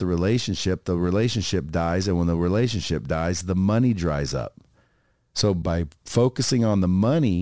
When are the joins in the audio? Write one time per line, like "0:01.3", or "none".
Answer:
0:05.6